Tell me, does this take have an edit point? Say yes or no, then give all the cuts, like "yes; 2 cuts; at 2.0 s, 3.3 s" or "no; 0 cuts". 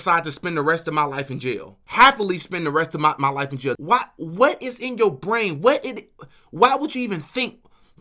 yes; 2 cuts; at 1.8 s, 3.8 s